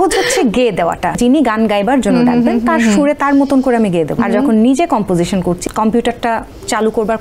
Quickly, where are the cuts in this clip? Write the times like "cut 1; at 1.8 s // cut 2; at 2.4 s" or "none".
cut 1; at 1.2 s // cut 2; at 4.2 s // cut 3; at 5.6 s